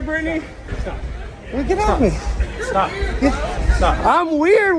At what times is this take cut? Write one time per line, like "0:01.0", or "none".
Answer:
0:03.4